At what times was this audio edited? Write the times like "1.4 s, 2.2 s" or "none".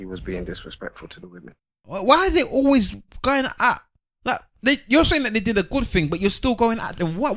1.6 s